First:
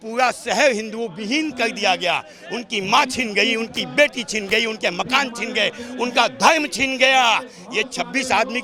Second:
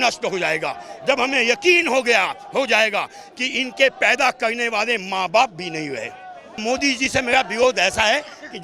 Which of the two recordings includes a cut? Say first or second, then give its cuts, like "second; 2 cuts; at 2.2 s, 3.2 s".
second; 1 cut; at 6.6 s